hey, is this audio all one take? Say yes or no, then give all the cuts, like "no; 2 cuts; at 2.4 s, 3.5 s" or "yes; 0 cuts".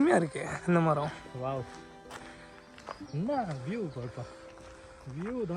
no; 1 cut; at 2.6 s